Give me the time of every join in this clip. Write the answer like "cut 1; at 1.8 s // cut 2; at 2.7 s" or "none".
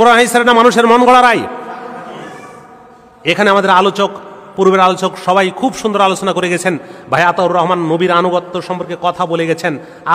none